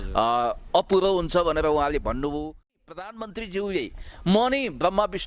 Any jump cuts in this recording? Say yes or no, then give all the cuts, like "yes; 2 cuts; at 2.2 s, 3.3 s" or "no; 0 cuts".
yes; 1 cut; at 2.8 s